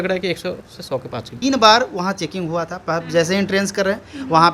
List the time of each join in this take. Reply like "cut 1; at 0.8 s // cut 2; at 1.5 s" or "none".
cut 1; at 1.3 s